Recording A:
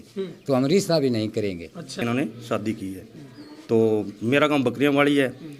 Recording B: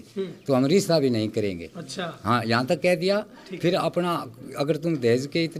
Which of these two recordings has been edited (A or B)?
A